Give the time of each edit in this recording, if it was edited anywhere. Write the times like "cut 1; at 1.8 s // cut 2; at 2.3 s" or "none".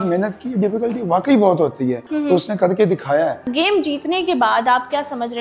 cut 1; at 2.1 s // cut 2; at 3.5 s